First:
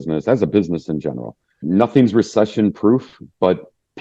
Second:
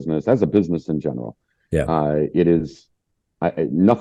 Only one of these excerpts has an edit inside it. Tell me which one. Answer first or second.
first